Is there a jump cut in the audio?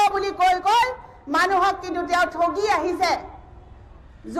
no; 0 cuts

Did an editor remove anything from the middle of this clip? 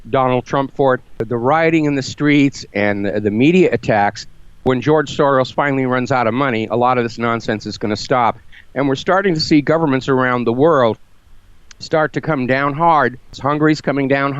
yes; 3 cuts; at 1.3 s, 4.6 s, 13.3 s

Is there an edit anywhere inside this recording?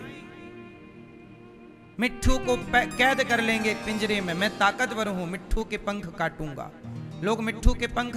no; 0 cuts

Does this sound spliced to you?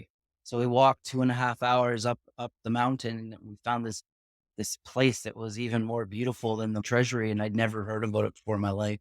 yes; 1 cut; at 6.8 s

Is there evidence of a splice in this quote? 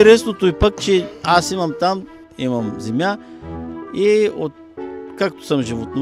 yes; 1 cut; at 2.2 s

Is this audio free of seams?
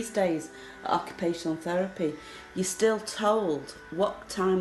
yes; 0 cuts

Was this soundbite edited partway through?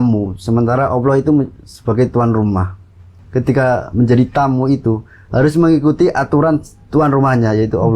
yes; 1 cut; at 3.2 s

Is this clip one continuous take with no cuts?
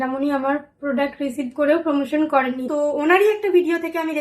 no; 1 cut; at 2.6 s

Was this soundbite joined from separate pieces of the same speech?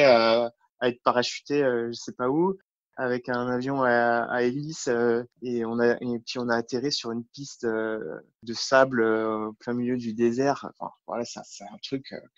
no; 0 cuts

